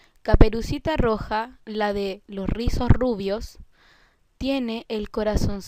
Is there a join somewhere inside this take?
yes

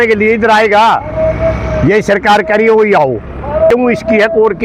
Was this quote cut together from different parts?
yes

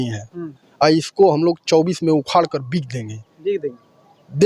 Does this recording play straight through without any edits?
yes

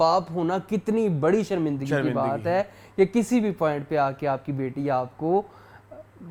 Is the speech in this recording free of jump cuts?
yes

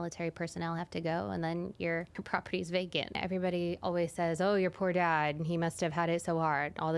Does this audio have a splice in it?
yes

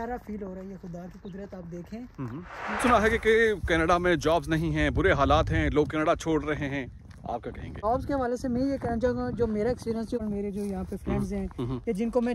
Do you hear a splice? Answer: yes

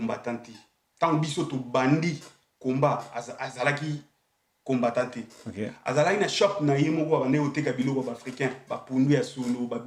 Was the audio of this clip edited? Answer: no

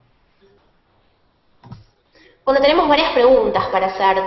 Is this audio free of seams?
yes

